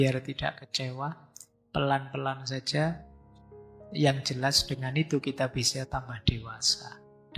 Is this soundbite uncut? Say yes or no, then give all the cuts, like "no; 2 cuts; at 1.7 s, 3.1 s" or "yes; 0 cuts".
yes; 0 cuts